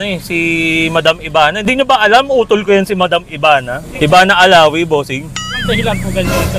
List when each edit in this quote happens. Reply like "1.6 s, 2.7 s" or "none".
3.8 s